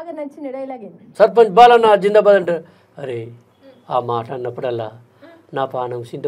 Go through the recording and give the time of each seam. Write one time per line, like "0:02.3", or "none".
0:01.0

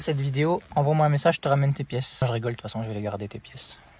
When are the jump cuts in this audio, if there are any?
0:02.2

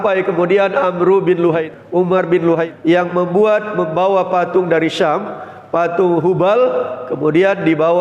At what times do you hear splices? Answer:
0:01.7
0:02.7

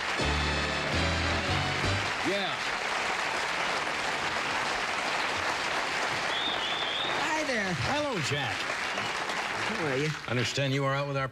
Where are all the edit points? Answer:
0:08.9

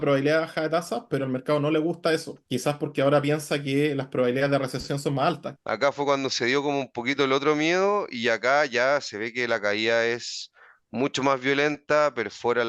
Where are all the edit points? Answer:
0:02.4
0:05.5

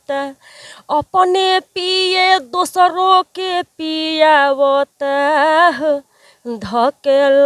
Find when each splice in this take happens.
none

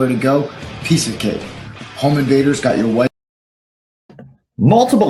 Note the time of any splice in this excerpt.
none

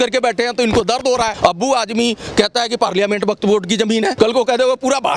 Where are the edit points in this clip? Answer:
0:01.3
0:04.1

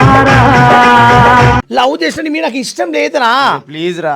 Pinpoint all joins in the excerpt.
0:01.7

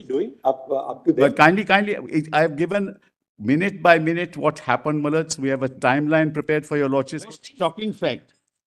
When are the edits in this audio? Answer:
0:07.2

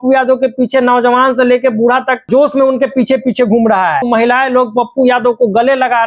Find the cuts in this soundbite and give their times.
0:02.3
0:04.0

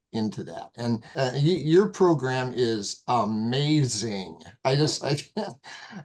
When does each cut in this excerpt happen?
0:01.1

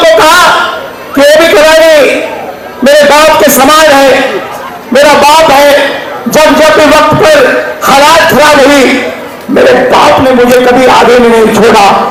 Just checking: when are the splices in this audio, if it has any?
none

